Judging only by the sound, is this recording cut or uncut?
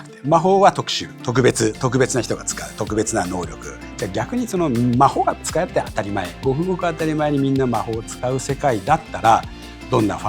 cut